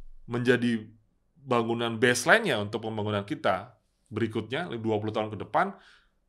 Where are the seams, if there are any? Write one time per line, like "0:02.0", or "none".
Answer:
none